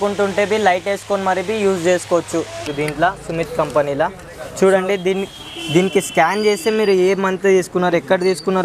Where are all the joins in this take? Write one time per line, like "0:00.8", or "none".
0:02.6